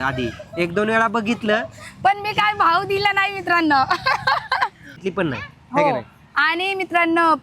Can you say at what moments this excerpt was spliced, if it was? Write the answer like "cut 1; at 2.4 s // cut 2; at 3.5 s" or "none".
cut 1; at 5.0 s